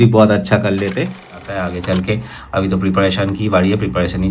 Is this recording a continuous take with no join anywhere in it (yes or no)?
no